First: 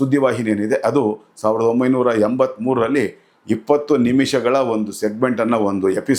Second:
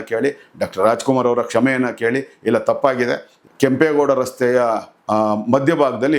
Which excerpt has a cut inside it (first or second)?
second